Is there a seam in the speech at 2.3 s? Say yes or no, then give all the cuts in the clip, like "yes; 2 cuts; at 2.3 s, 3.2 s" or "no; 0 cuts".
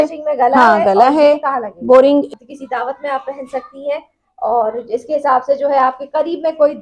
yes; 1 cut; at 2.3 s